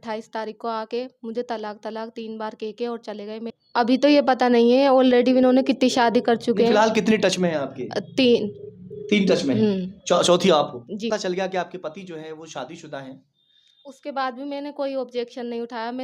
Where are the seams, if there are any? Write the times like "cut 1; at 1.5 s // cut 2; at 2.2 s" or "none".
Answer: cut 1; at 3.6 s // cut 2; at 11.1 s